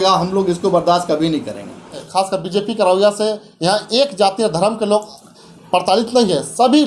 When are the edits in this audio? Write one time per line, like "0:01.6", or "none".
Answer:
0:02.0